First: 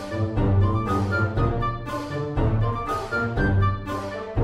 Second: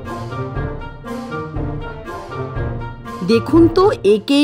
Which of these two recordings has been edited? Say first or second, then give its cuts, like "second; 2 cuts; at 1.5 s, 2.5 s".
second; 1 cut; at 3.2 s